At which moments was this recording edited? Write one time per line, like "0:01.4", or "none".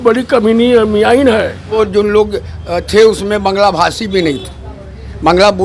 0:01.8